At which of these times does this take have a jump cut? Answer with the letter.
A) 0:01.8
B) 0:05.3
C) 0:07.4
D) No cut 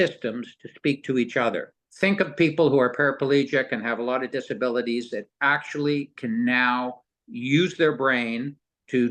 A